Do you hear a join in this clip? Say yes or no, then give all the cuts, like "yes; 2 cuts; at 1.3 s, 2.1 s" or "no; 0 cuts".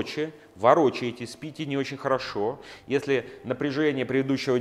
no; 0 cuts